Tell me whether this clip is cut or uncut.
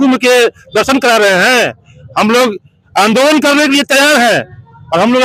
uncut